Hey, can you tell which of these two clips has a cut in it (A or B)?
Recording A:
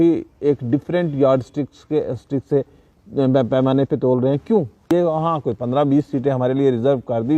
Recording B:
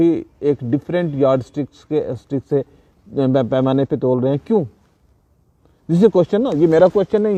A